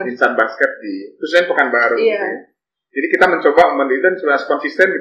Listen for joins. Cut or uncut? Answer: uncut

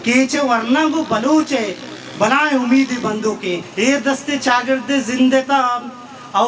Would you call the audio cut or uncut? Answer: cut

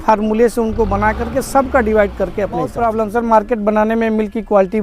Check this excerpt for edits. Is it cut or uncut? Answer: cut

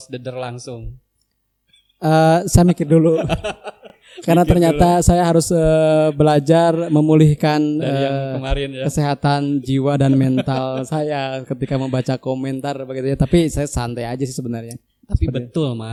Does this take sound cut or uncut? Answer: uncut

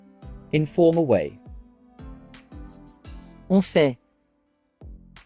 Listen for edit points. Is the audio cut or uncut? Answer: cut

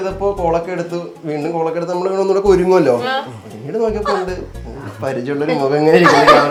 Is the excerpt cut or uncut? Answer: uncut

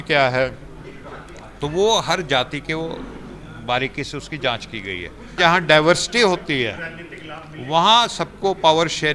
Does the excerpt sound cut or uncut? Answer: cut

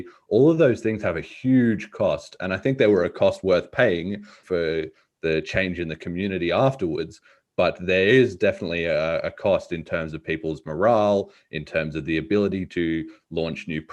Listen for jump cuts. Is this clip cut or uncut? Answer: cut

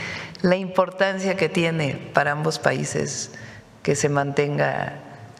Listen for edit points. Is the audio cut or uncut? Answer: uncut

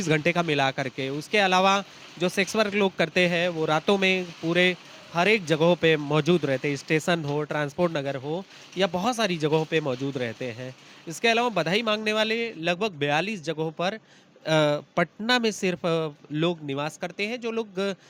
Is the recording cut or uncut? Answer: uncut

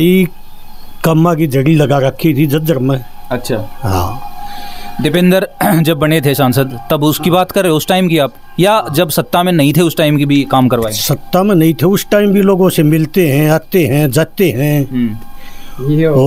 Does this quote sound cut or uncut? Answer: uncut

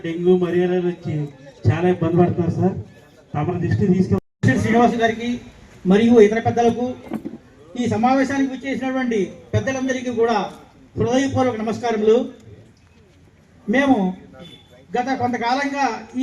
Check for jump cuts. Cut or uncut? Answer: cut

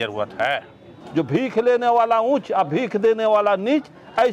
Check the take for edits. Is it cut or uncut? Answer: cut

